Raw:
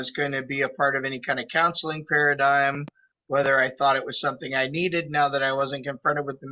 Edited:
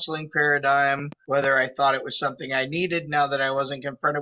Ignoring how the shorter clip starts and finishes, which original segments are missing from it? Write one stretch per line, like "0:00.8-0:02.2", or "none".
0:02.9-0:03.1